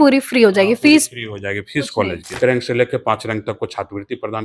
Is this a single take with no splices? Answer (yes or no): no